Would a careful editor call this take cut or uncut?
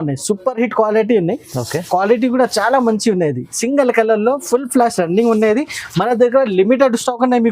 uncut